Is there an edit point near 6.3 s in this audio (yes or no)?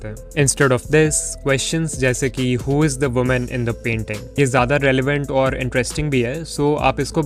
no